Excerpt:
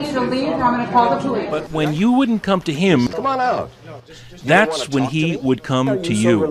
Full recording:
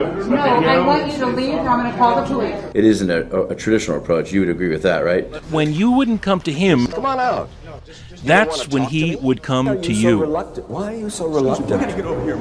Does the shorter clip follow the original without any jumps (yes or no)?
no